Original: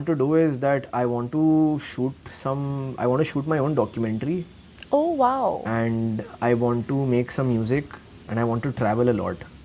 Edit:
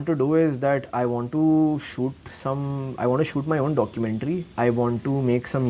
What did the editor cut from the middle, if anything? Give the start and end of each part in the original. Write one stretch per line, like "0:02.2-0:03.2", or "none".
0:04.5-0:06.3